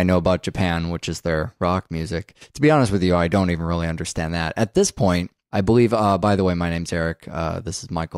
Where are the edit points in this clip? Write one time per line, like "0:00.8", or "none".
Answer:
0:02.3